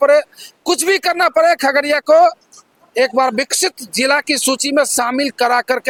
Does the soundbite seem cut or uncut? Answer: uncut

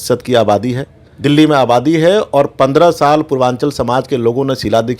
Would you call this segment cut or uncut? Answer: cut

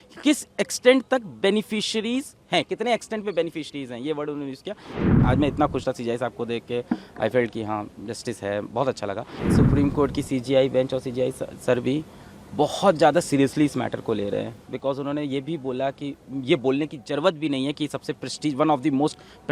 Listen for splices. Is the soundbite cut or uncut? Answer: cut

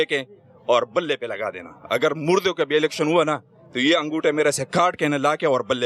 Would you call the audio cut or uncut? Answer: uncut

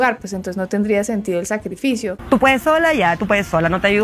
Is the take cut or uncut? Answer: cut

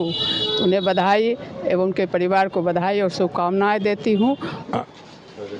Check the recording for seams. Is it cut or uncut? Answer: cut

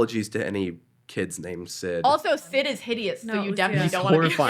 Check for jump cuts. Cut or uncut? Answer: cut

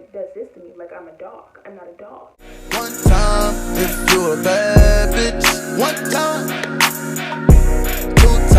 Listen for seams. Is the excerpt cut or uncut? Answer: cut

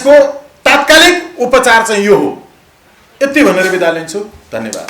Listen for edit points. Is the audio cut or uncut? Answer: uncut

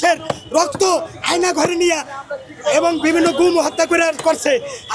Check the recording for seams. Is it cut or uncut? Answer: uncut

